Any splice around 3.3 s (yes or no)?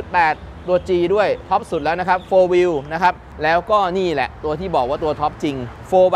yes